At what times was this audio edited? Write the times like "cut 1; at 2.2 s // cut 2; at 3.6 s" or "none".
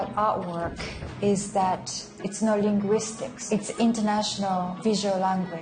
cut 1; at 2.2 s // cut 2; at 4.7 s